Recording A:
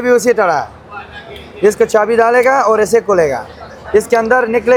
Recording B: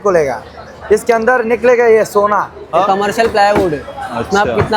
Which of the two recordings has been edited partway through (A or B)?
B